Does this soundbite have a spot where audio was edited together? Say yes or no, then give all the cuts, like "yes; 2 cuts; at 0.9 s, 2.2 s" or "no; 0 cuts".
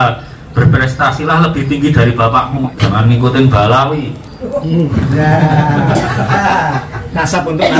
yes; 1 cut; at 2.7 s